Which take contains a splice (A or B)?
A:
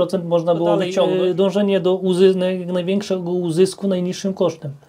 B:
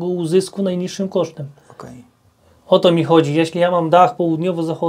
A